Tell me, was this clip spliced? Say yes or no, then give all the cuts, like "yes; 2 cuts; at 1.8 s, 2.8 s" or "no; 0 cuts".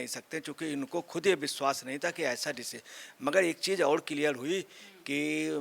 no; 0 cuts